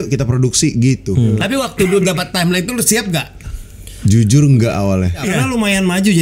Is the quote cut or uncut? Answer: cut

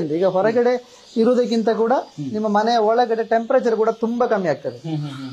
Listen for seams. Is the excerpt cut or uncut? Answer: uncut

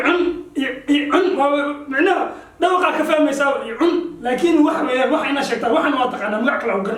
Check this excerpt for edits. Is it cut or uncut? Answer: uncut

